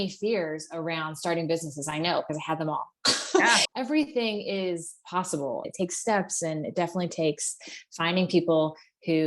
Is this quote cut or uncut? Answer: cut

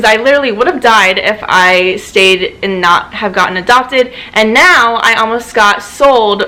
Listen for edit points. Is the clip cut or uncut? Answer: uncut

